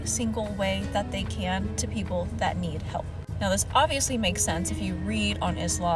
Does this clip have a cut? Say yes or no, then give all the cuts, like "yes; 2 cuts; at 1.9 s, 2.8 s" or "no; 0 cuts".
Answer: no; 0 cuts